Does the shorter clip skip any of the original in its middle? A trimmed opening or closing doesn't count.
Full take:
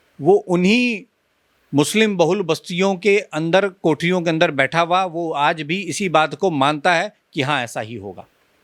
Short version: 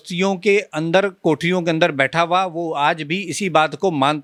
no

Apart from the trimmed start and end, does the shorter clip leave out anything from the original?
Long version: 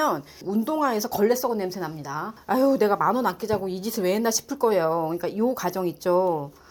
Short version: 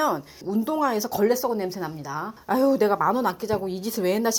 no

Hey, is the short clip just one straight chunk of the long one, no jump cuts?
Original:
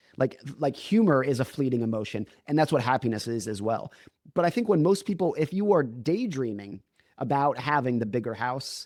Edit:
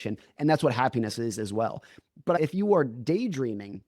no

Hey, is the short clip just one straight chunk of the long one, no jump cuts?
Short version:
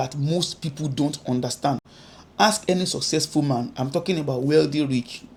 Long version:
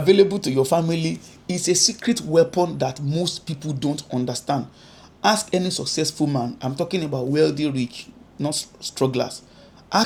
yes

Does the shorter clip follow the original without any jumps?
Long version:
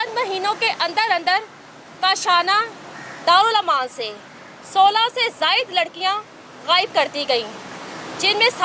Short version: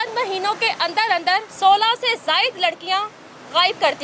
no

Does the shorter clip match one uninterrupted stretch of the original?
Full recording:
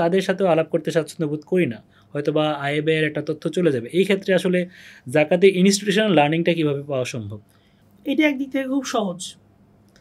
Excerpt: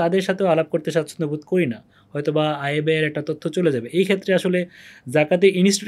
yes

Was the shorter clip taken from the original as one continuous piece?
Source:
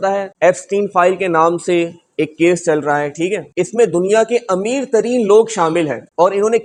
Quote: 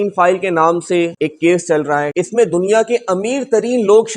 no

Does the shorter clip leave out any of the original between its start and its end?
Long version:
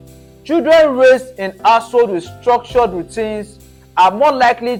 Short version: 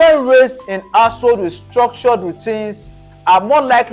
no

